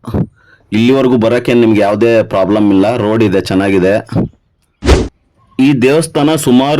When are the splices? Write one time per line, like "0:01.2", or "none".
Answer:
0:04.8